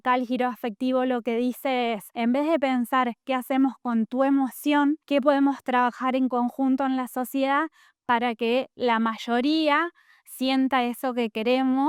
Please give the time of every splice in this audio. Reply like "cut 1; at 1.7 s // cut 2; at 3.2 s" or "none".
none